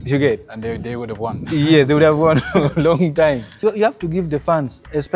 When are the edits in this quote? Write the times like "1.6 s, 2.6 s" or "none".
3.6 s

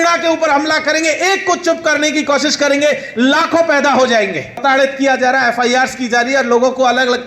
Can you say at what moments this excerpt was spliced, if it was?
4.6 s

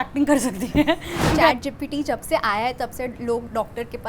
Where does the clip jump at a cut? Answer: 1.5 s

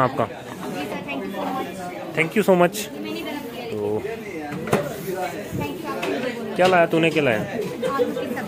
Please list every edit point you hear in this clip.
none

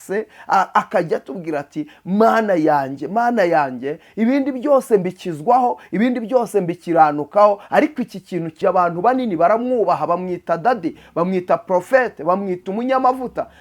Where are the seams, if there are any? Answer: 8.5 s

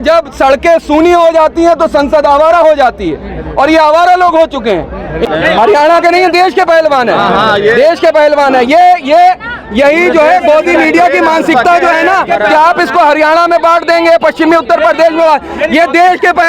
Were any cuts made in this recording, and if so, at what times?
5.2 s

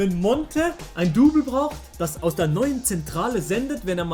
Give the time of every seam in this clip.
none

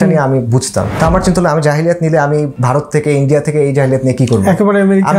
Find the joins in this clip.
0.9 s, 2.5 s

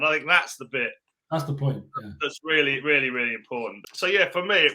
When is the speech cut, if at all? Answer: 3.8 s

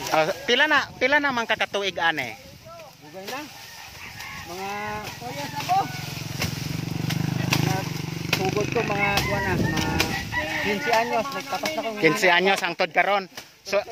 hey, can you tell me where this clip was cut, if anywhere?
none

